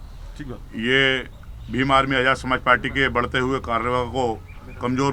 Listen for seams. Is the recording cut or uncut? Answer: uncut